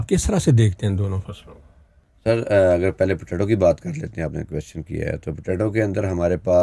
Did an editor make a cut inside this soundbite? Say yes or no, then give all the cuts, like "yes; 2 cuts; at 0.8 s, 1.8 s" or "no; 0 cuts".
no; 0 cuts